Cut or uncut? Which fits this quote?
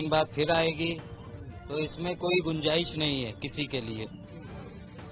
uncut